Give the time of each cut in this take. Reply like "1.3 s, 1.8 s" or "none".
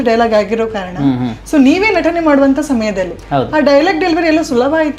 none